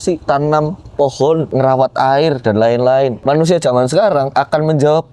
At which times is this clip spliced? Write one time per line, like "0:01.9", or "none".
0:01.5
0:03.2

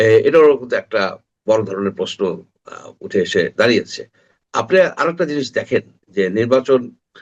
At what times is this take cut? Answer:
none

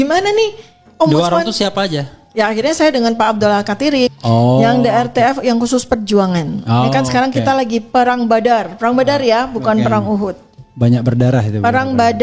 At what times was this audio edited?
0:04.1

